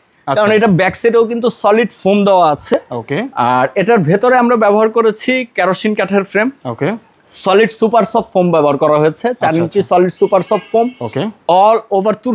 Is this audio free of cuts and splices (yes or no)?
yes